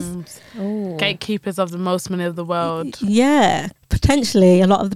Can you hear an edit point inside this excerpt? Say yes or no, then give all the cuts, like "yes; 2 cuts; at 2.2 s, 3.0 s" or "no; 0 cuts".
yes; 1 cut; at 3.7 s